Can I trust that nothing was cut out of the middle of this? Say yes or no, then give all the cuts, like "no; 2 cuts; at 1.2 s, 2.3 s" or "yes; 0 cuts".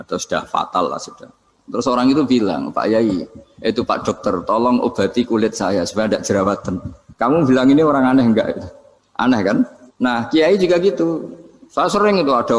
yes; 0 cuts